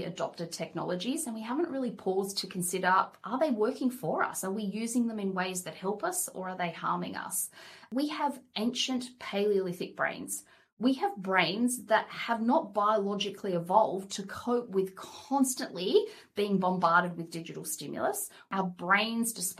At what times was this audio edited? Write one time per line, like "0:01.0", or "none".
0:07.9
0:18.5